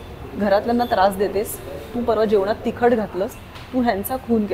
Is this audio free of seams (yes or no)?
no